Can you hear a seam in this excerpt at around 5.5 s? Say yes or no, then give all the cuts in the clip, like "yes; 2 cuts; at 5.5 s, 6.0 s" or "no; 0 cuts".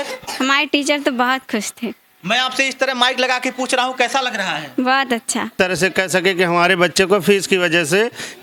yes; 1 cut; at 5.5 s